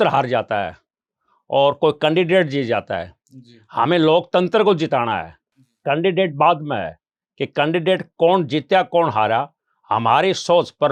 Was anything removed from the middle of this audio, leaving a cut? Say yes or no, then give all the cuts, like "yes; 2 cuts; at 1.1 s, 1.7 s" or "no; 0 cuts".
no; 0 cuts